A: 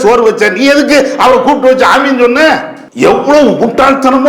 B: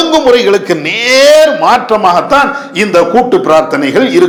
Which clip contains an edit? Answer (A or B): A